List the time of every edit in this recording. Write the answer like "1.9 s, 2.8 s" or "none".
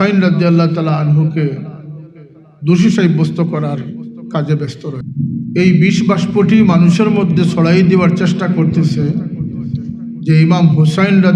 5.1 s